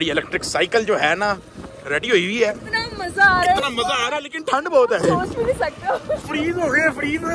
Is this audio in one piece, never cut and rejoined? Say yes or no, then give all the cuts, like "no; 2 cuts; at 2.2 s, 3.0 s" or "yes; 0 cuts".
yes; 0 cuts